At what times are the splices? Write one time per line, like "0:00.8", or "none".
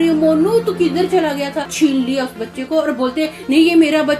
0:01.7

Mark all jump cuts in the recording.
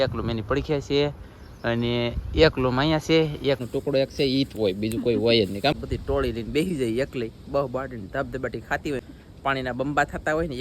0:03.6
0:05.8
0:09.0

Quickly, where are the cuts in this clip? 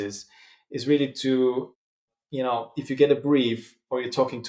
none

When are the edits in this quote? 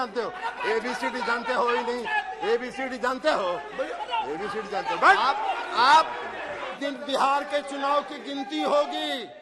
0:06.8

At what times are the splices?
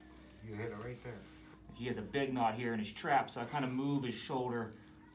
0:01.5

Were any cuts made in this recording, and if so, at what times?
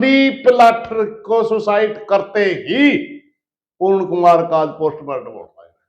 none

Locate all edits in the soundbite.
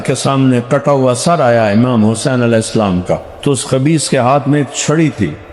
0:03.3

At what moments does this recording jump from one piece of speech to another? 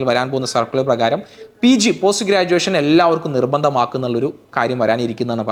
none

